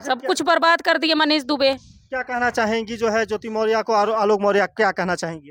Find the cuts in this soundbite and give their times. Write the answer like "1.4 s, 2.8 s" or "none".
none